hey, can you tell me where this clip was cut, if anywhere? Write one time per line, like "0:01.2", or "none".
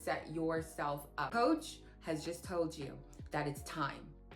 0:01.3